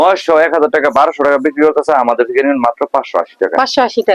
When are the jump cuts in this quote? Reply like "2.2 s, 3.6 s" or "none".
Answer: none